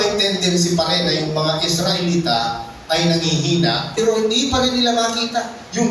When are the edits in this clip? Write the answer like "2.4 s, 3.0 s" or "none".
3.9 s